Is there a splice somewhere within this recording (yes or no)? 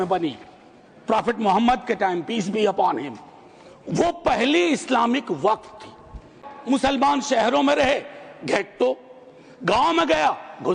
yes